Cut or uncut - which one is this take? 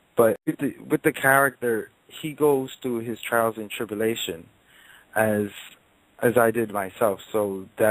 uncut